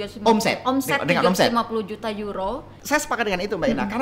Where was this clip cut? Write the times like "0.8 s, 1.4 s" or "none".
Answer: 2.7 s